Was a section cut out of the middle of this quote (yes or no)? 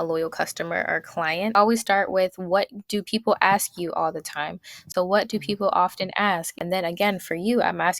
yes